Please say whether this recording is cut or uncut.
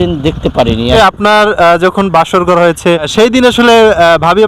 cut